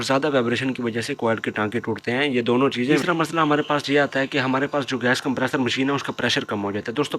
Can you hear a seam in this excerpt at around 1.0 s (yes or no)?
no